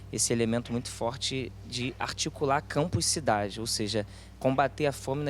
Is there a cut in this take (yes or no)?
no